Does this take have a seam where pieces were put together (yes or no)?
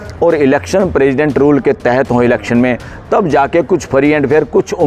no